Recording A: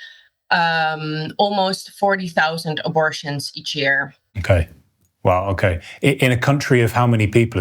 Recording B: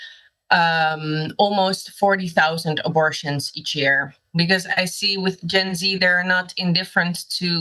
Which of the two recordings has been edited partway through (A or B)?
B